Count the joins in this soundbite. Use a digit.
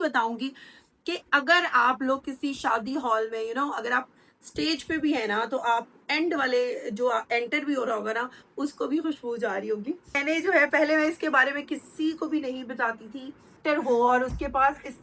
2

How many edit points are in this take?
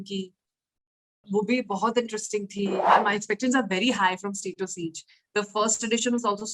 1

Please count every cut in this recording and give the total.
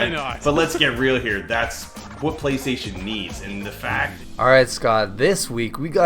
1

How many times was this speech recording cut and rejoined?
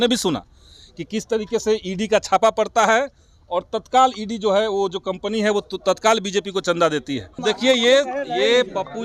1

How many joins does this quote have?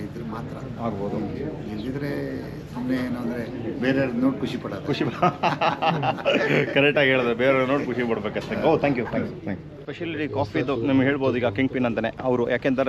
0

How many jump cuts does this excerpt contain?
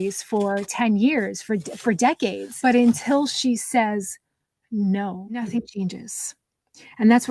2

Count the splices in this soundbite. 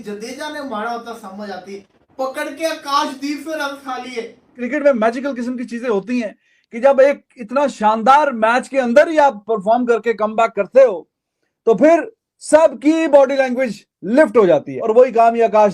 2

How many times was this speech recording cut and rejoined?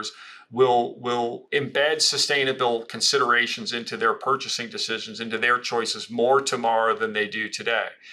1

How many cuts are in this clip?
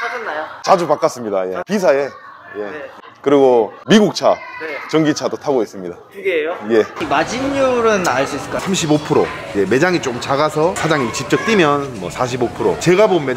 3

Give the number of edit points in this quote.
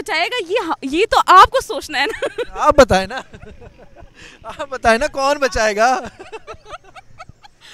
0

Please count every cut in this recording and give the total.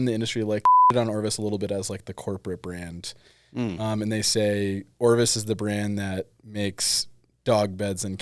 1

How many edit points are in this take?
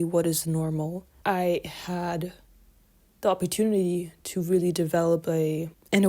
1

